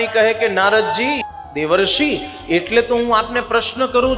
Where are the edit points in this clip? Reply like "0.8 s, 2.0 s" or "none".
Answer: 1.2 s